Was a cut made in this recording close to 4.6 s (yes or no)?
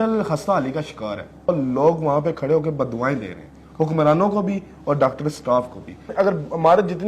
no